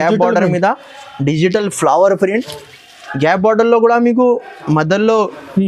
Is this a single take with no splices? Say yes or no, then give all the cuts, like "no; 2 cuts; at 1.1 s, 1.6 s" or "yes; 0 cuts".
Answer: yes; 0 cuts